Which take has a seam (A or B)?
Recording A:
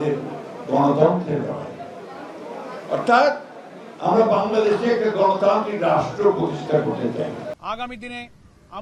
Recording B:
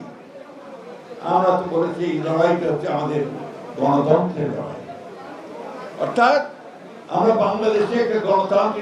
A